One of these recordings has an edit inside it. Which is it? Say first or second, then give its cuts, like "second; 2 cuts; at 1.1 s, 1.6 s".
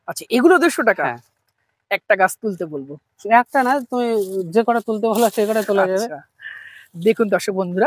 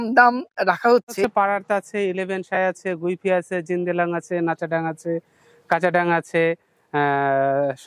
second; 1 cut; at 1.2 s